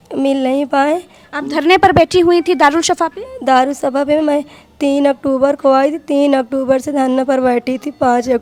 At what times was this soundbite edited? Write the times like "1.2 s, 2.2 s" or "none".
none